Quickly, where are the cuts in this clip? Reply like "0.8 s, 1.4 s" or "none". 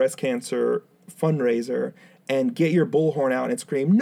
none